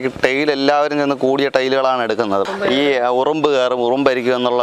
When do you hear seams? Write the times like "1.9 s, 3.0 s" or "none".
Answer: 2.4 s